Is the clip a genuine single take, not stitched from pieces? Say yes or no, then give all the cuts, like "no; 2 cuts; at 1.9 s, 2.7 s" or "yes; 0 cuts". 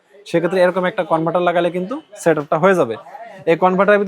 yes; 0 cuts